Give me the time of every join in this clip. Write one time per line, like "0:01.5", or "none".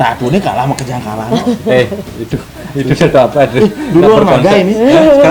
none